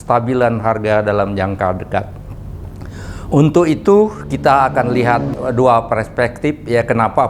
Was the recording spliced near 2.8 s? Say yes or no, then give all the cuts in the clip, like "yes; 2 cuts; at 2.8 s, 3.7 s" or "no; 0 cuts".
no; 1 cut; at 5.3 s